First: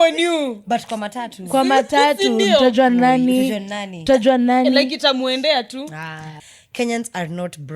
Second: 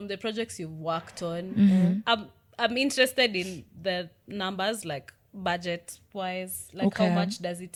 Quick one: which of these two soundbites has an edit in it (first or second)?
first